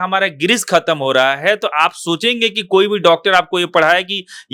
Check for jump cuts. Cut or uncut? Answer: uncut